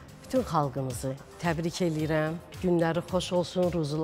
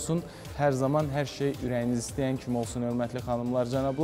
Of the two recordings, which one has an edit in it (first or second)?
first